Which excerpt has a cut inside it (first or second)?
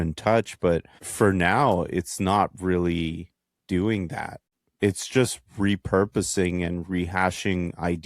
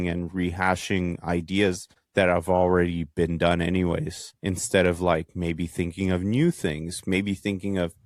first